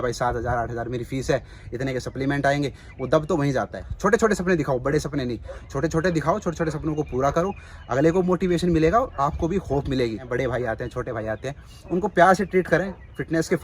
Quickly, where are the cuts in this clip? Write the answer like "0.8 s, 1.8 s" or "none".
3.8 s, 10.2 s